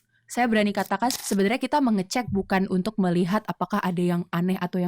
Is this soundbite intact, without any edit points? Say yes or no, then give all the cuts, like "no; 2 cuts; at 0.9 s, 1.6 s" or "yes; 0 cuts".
no; 1 cut; at 1.1 s